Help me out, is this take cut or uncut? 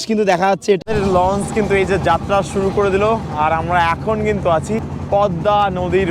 cut